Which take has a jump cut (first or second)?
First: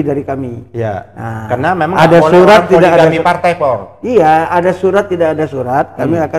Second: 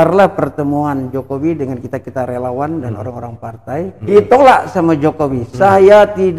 second